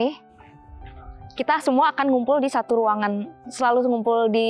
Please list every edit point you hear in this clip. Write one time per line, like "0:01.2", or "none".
none

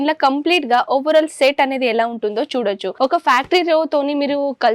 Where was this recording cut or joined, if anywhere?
0:02.9

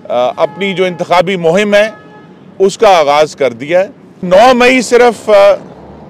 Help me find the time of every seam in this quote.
0:04.3

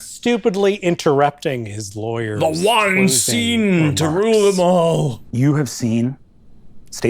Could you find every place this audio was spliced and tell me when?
0:05.2

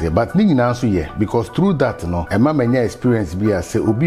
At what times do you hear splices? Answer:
0:02.1

